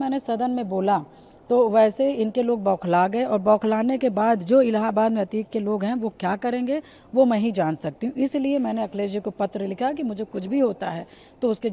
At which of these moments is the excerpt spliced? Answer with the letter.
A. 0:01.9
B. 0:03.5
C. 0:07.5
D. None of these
D